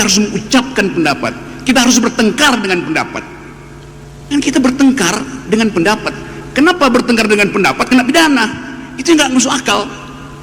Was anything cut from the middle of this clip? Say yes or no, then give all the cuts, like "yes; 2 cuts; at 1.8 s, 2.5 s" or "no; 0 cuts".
no; 0 cuts